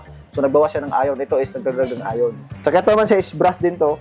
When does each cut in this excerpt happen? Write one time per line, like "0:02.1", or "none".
0:02.5